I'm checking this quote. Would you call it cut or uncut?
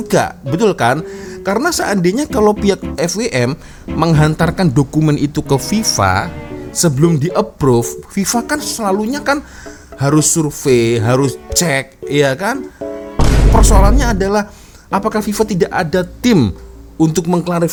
uncut